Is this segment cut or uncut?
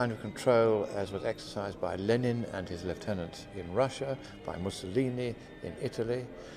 cut